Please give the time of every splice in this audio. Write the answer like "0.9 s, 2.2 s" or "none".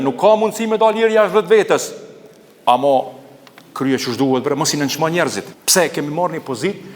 5.5 s